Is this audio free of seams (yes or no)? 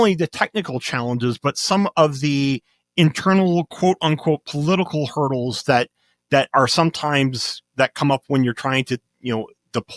yes